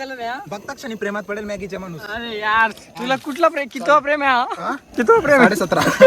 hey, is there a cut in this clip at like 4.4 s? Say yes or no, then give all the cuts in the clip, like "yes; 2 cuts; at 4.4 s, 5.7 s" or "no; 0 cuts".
no; 2 cuts; at 2.0 s, 2.9 s